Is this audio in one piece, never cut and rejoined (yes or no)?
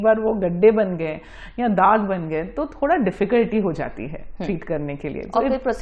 yes